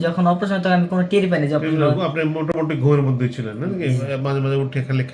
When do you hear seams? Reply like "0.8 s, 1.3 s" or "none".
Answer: none